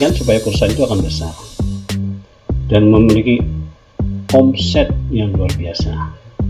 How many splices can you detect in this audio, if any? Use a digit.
0